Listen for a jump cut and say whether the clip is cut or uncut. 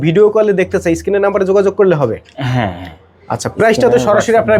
uncut